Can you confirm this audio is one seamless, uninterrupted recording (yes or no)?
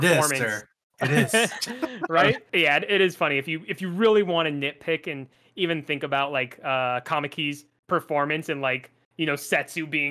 no